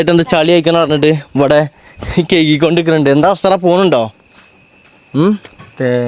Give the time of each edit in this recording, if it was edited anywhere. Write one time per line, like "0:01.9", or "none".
none